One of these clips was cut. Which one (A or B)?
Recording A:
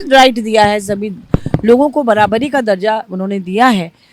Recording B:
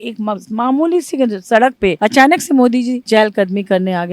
B